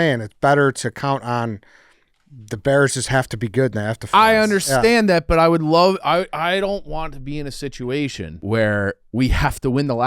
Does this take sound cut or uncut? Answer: cut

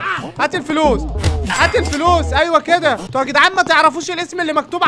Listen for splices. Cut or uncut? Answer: cut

